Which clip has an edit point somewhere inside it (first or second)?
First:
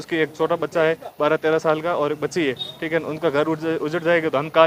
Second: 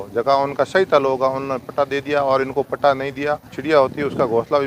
second